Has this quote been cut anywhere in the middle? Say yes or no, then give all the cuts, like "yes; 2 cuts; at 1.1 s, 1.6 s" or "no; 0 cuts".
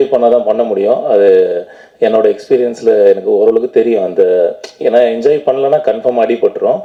no; 0 cuts